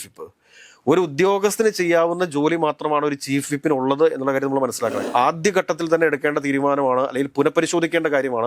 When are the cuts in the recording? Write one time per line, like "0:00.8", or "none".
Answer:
0:05.0

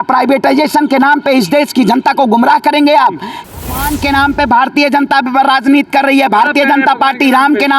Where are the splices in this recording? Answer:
0:03.5

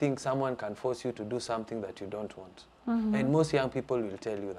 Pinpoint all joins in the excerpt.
none

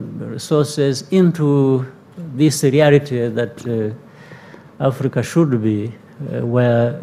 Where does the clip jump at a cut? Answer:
none

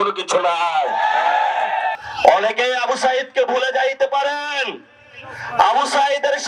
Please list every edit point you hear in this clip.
0:02.0

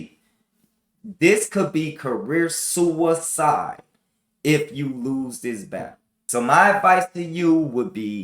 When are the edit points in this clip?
0:06.1

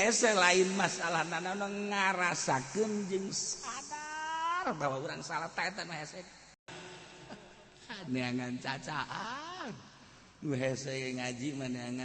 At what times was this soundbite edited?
0:06.7

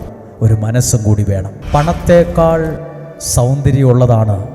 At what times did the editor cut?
0:01.6

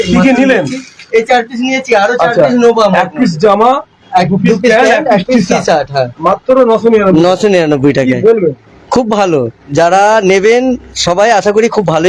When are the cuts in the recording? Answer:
none

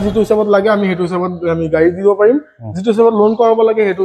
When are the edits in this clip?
none

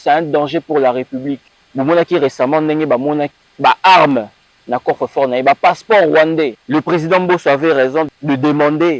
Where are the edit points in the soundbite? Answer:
0:01.5
0:03.4
0:06.6
0:08.1

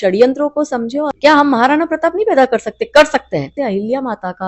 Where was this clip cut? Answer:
0:01.1
0:03.5

